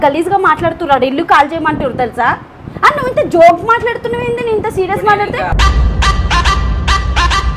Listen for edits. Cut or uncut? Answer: uncut